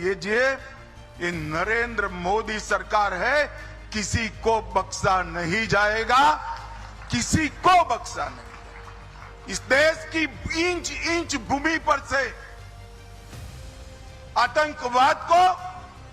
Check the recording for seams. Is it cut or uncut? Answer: cut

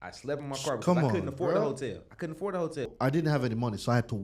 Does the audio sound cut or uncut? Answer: cut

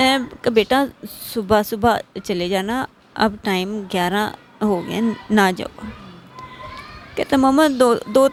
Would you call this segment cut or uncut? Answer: uncut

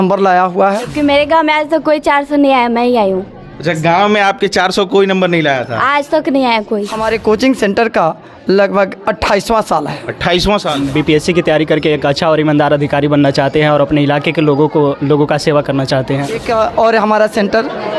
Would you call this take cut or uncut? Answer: cut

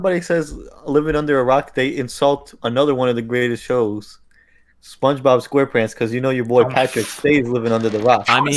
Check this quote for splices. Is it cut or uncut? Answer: uncut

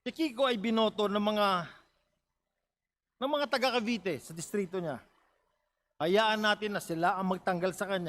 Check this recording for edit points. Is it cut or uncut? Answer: uncut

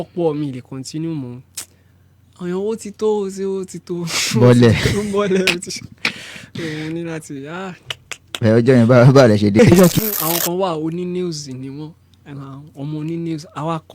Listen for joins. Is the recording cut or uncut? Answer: cut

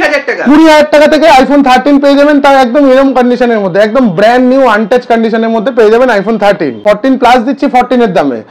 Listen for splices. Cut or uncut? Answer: cut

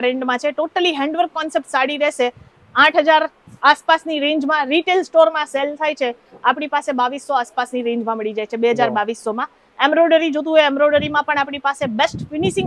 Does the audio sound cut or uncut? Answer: uncut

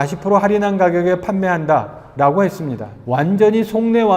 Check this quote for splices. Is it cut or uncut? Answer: uncut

